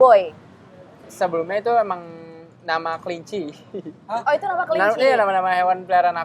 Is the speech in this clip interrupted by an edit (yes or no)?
yes